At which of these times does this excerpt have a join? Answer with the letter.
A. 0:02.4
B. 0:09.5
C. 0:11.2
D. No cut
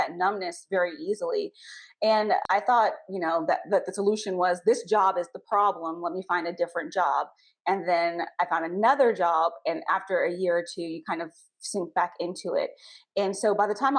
A